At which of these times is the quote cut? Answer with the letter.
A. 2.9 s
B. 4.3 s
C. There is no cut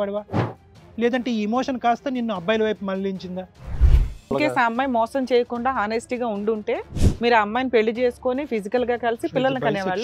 B